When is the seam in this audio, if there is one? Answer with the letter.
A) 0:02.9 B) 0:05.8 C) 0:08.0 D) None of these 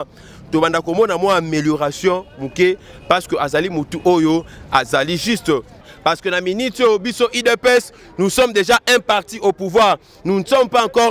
B